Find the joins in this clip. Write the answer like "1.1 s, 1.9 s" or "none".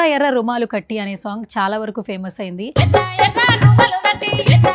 none